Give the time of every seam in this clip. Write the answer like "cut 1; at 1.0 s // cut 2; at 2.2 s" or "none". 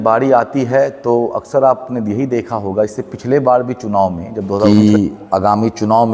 cut 1; at 4.7 s